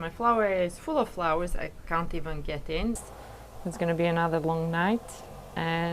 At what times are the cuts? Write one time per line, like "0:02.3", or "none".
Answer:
0:03.1